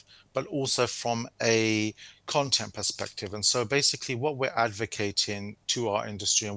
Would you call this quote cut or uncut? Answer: uncut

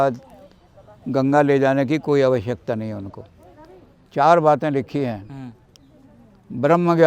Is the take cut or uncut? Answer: cut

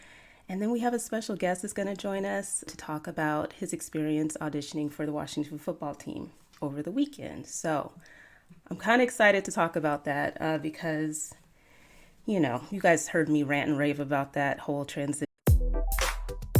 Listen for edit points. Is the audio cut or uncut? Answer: cut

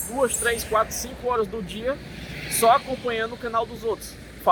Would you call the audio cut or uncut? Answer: uncut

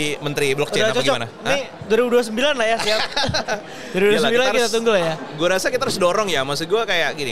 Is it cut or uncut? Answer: uncut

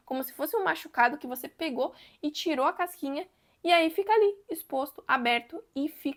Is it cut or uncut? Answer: uncut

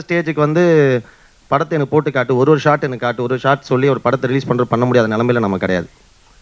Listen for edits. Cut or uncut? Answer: uncut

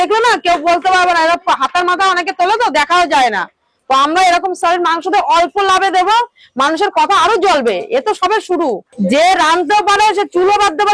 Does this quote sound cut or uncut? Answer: cut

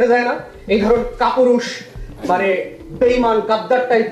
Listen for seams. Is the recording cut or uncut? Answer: uncut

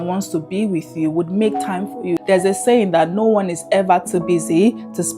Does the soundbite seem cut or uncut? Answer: cut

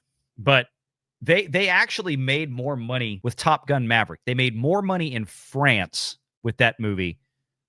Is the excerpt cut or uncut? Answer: cut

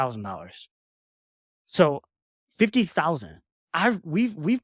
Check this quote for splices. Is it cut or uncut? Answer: uncut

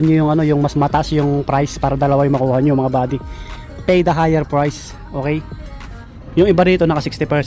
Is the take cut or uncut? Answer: cut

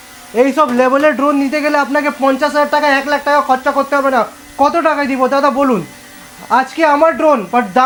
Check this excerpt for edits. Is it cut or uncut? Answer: uncut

